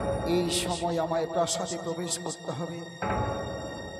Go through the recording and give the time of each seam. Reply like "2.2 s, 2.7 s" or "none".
none